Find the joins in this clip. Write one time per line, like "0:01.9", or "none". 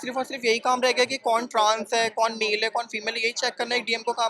none